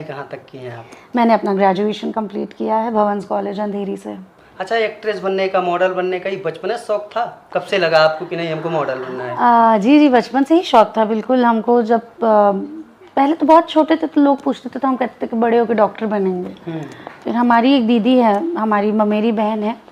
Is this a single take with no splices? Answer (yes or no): yes